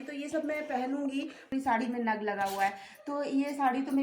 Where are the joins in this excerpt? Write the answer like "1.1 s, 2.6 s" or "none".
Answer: 1.4 s